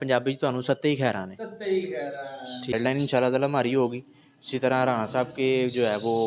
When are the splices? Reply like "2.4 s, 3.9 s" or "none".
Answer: 2.7 s

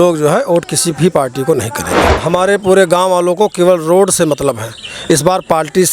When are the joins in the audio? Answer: 2.1 s

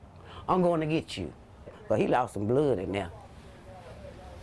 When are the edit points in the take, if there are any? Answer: 1.7 s

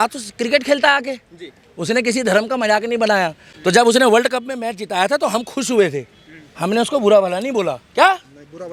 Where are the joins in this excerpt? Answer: none

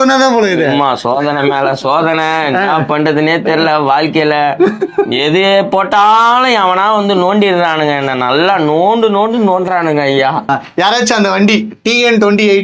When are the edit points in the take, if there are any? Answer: 10.5 s

